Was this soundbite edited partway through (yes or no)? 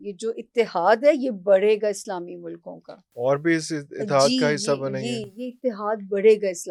no